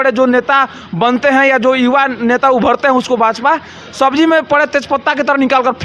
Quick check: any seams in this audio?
no; 0 cuts

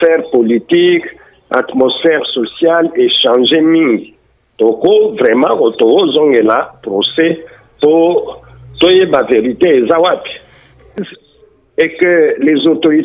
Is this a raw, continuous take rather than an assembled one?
no; 1 cut; at 11.0 s

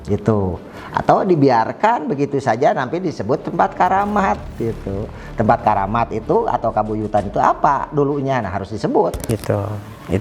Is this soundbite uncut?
no; 1 cut; at 9.2 s

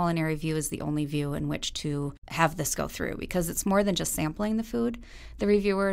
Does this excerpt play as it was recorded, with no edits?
no; 1 cut; at 2.2 s

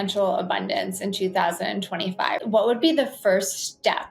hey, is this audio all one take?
no; 1 cut; at 2.4 s

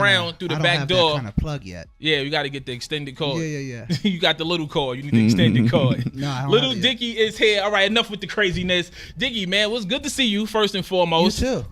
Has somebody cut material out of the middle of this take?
yes; 1 cut; at 10.7 s

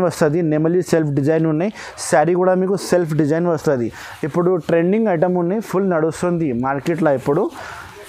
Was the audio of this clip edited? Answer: no; 0 cuts

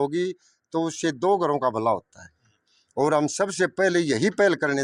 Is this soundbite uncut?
yes; 0 cuts

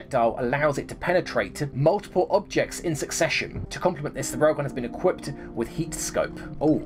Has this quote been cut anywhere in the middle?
no; 0 cuts

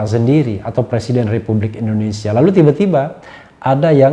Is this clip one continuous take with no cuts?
yes; 0 cuts

